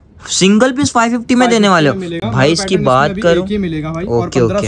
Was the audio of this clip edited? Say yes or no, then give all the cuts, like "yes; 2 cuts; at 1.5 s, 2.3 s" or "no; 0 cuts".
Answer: no; 0 cuts